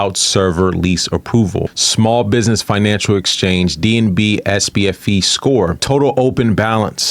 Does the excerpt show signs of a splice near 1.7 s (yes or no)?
yes